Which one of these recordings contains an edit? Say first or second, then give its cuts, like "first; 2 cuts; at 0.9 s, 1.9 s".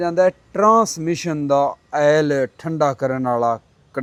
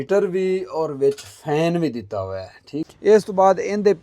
second; 1 cut; at 2.7 s